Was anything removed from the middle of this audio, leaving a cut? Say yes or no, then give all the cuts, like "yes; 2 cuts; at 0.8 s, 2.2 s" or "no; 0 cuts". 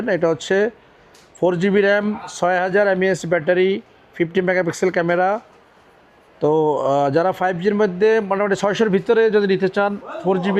no; 0 cuts